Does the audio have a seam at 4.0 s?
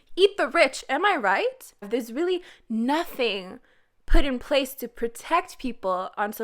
no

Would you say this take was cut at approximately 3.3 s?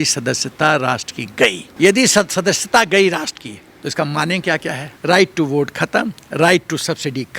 no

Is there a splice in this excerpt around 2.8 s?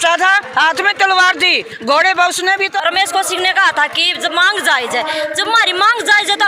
yes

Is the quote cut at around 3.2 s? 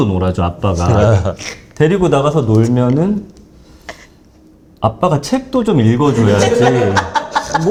no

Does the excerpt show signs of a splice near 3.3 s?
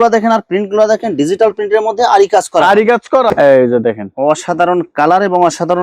yes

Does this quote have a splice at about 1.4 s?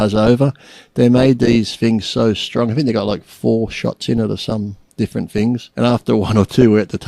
no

